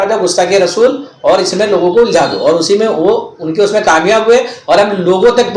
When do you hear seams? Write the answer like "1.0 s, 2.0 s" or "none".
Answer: none